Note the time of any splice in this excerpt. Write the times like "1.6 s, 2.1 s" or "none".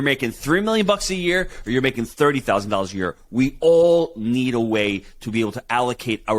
none